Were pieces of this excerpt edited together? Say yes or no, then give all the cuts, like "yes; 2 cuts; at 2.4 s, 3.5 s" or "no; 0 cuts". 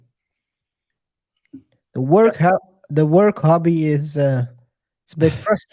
no; 0 cuts